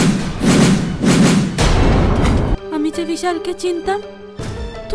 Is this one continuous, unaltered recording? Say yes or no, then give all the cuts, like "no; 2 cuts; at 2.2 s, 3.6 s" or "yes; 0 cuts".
no; 1 cut; at 2.5 s